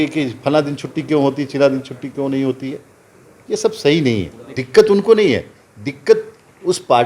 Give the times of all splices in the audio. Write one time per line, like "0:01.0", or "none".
0:04.6